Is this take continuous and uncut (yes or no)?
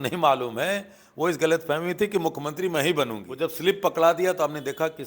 no